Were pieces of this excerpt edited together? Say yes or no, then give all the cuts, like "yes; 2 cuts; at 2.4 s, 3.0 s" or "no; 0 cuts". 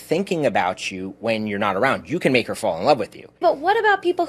yes; 1 cut; at 3.3 s